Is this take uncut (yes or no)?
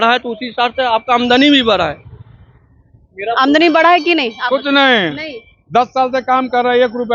yes